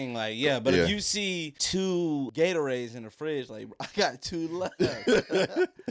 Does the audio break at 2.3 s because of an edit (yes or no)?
yes